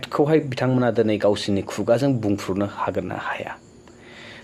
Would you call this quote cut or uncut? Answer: uncut